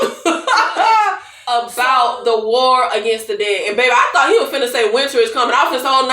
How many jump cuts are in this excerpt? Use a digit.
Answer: 1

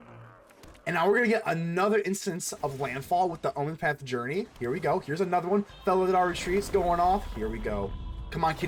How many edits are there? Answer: 0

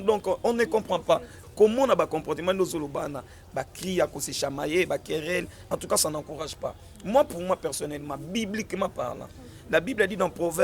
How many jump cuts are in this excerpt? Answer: 1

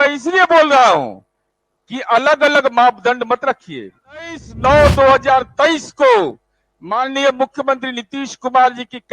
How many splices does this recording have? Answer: 1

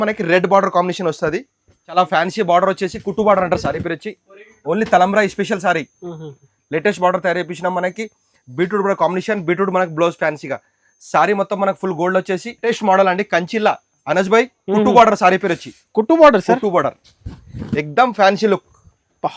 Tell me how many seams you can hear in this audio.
2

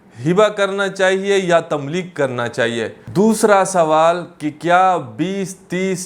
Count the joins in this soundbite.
1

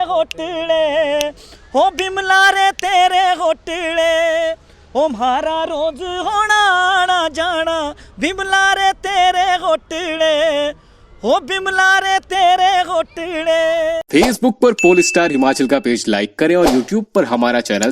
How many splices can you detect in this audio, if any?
1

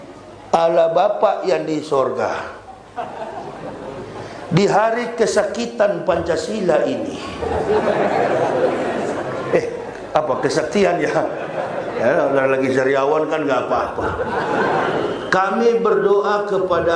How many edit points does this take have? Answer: 1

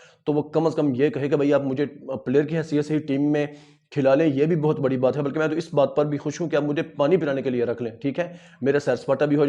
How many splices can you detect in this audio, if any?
0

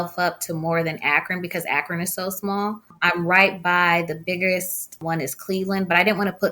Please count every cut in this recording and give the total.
2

